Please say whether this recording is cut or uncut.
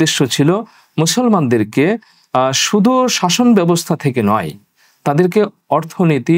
uncut